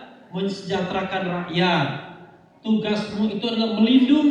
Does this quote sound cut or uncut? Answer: uncut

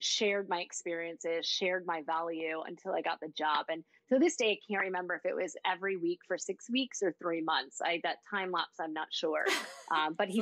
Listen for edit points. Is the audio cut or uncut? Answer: uncut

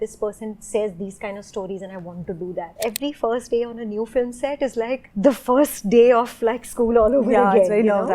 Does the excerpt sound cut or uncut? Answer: cut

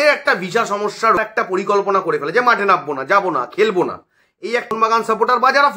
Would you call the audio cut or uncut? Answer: cut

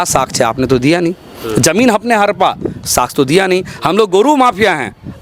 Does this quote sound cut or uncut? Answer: uncut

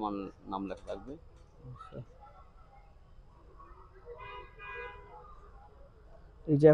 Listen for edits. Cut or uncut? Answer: uncut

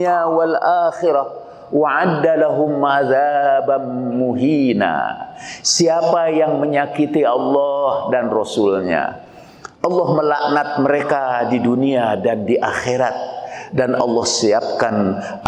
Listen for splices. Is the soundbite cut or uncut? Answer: uncut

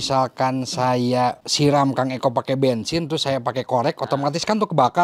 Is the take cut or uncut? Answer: cut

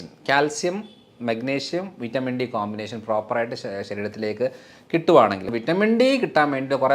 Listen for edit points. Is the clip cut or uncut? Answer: cut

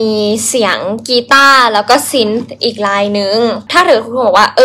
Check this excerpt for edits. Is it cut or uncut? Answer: cut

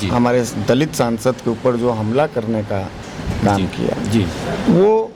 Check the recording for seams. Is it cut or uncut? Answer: uncut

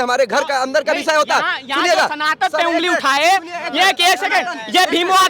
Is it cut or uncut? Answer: uncut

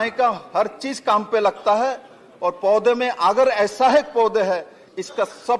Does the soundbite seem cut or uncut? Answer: uncut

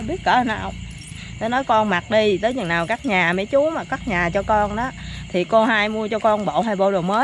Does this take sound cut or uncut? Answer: uncut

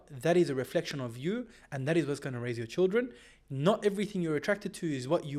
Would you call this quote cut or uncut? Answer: uncut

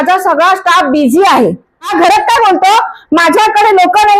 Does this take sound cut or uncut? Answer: cut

